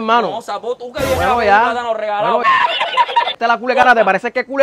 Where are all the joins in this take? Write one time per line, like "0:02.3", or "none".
0:03.3